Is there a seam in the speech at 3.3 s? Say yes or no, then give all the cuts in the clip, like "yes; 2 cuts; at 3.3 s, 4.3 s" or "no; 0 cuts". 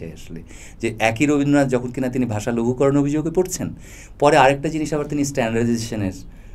no; 0 cuts